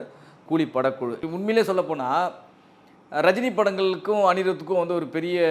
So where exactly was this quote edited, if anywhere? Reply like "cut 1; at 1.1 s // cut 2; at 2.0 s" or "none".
cut 1; at 1.2 s

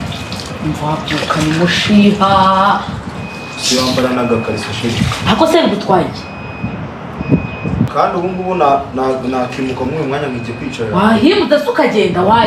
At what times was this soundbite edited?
cut 1; at 7.9 s

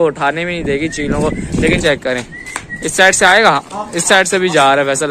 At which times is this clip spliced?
cut 1; at 1.8 s

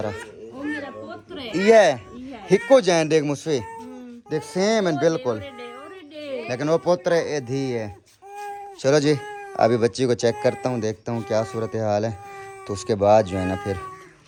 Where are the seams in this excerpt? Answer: none

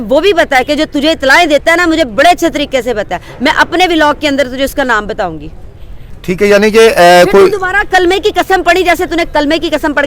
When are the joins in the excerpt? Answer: none

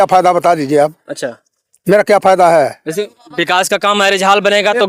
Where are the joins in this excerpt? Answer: none

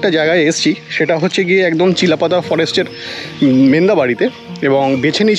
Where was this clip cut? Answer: none

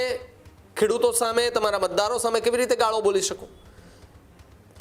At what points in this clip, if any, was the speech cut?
none

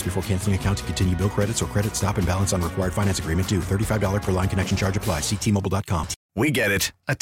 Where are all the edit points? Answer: cut 1; at 6.2 s

